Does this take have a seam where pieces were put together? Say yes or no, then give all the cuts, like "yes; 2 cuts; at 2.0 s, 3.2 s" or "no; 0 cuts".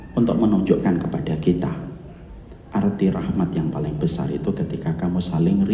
no; 0 cuts